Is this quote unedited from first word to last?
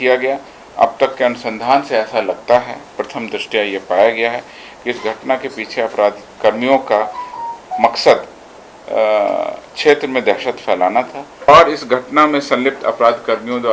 no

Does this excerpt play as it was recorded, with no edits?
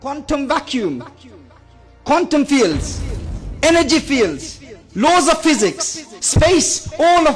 yes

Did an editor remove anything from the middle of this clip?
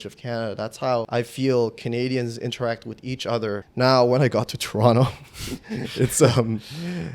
yes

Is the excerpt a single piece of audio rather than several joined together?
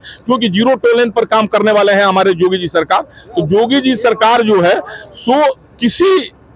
yes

